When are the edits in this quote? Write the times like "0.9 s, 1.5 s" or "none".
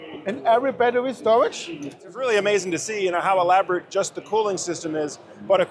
2.1 s